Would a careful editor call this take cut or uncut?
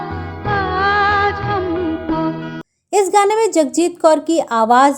cut